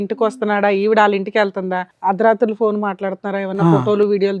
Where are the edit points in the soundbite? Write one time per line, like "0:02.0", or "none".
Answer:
0:01.8